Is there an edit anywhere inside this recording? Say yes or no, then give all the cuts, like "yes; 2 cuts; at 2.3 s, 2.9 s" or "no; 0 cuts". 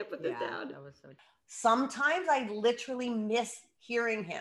yes; 1 cut; at 1.4 s